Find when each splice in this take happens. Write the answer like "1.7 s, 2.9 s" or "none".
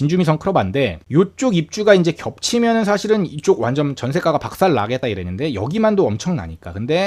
1.0 s

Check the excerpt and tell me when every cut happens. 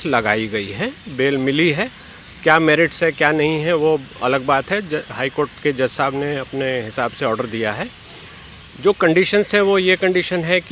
none

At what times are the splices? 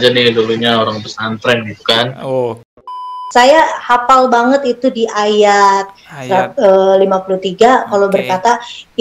3.1 s

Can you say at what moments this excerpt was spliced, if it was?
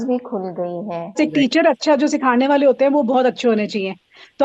1.2 s

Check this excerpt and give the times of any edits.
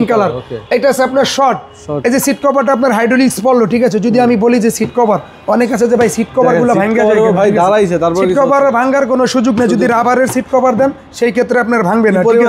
none

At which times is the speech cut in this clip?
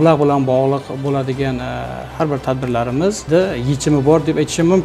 none

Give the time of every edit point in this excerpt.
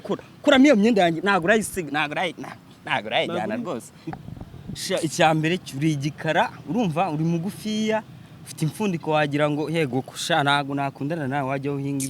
3.9 s

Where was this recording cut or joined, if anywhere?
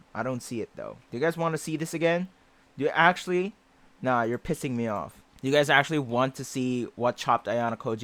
none

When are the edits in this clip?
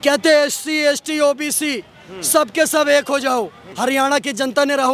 3.6 s

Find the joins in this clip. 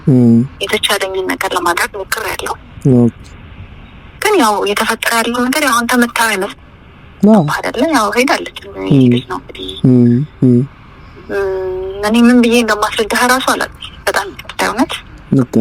none

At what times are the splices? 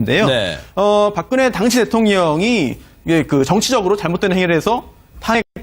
3.8 s

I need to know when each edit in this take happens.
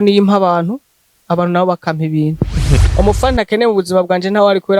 2.8 s

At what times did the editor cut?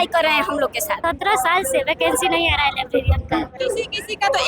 0.9 s, 3.5 s

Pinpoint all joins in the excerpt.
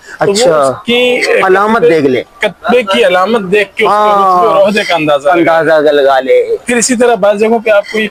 none

